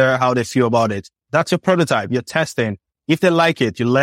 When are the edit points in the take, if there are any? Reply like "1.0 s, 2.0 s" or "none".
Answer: 1.3 s